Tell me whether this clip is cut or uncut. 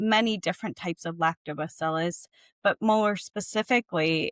uncut